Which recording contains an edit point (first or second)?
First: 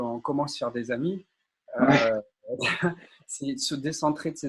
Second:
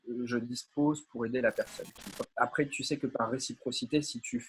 second